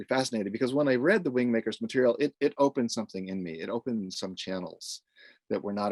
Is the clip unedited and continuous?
yes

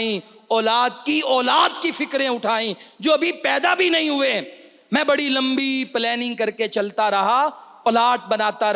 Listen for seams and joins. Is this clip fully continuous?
yes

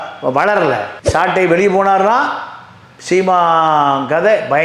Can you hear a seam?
yes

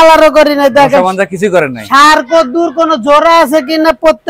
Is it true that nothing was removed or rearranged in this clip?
yes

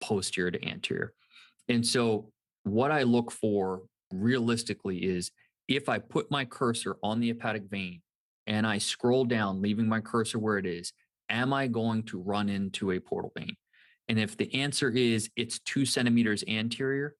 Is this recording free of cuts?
yes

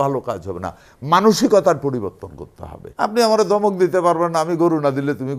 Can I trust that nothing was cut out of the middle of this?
no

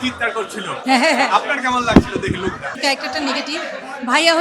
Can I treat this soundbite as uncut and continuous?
no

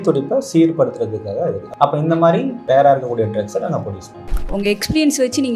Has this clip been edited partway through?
yes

